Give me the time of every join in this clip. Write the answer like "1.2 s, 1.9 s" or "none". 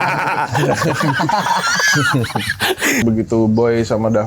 3.0 s